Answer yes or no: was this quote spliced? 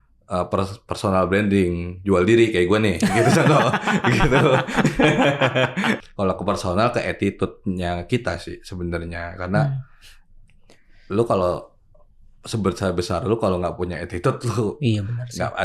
yes